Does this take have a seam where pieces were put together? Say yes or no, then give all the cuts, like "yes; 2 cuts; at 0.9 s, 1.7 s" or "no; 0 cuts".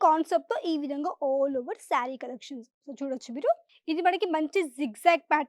yes; 1 cut; at 3.7 s